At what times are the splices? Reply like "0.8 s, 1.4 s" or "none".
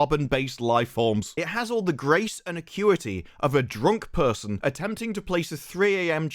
1.3 s